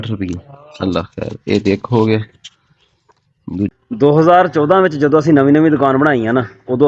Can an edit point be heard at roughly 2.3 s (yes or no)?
no